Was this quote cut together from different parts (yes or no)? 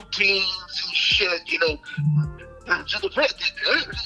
no